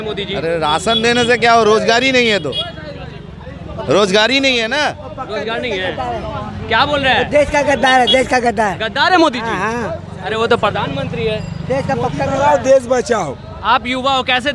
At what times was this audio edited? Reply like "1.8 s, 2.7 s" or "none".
none